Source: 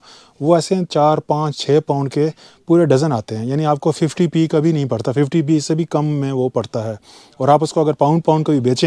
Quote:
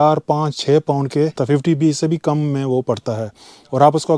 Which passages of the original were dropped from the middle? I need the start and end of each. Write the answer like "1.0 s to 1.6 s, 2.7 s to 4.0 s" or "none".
2.4 s to 5.1 s